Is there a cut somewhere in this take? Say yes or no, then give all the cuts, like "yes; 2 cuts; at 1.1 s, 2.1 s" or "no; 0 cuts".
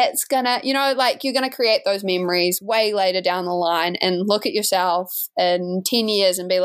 no; 0 cuts